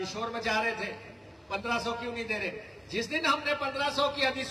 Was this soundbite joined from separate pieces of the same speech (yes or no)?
no